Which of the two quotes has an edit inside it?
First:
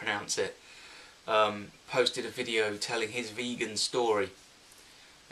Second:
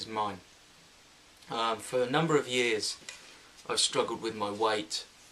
second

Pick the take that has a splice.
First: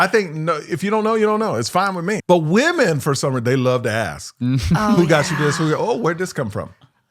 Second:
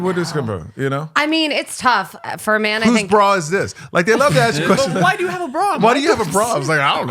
first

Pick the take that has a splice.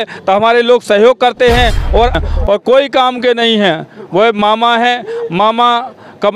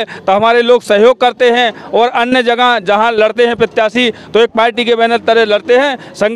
first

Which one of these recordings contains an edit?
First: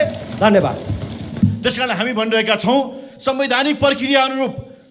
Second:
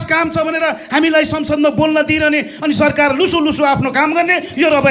first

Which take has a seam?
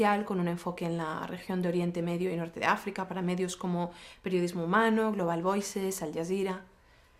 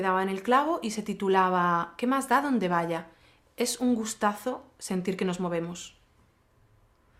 first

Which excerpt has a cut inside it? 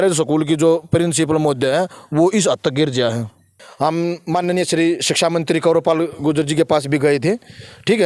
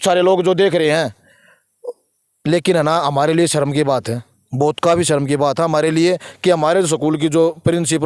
first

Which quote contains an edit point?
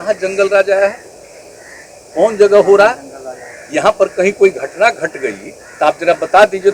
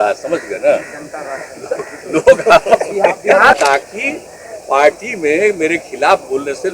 second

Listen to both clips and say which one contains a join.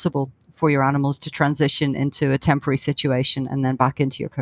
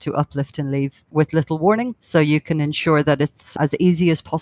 second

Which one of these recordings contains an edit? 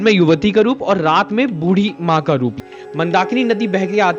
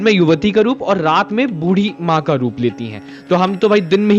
first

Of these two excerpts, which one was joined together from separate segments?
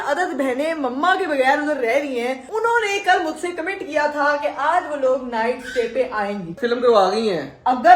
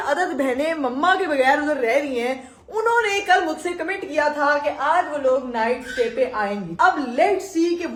first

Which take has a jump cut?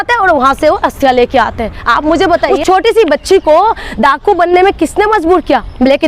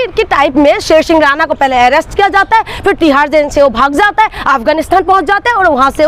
first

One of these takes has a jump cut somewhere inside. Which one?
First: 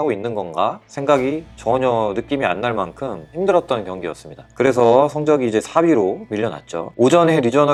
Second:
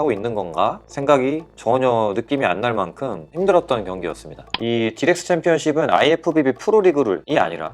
second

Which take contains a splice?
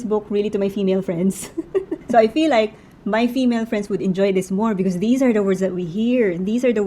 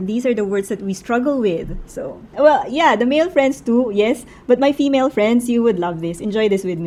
first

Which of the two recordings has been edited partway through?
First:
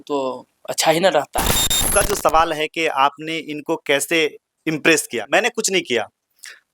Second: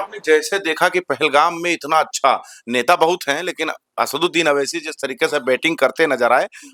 first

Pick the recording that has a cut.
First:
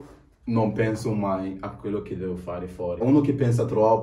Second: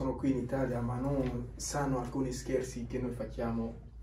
first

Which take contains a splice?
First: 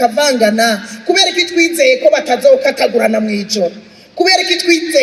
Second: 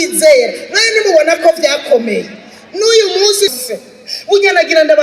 second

